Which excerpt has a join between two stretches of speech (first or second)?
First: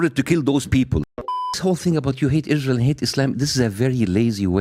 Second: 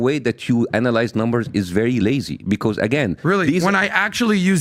first